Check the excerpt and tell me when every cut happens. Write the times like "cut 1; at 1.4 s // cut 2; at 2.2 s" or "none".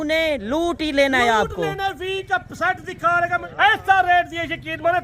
cut 1; at 3.5 s